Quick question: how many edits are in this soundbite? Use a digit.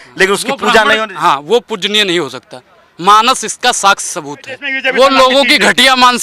1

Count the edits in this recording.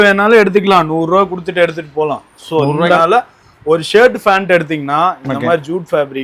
1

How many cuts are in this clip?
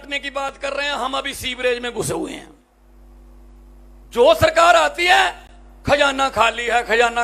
1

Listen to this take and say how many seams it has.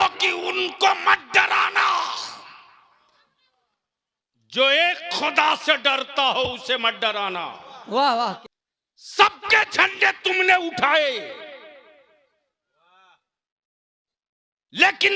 1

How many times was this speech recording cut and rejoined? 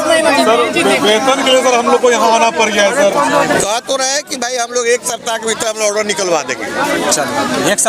1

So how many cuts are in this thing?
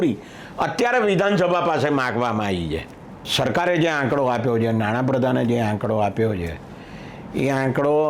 1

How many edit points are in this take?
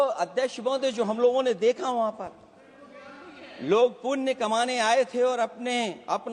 0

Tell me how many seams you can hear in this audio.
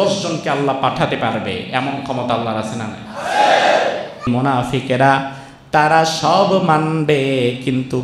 1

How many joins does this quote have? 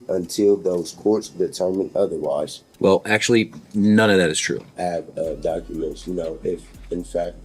2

